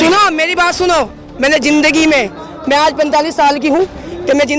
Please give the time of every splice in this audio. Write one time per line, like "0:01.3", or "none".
none